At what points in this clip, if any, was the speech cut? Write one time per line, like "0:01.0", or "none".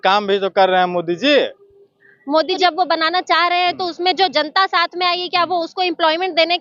0:02.6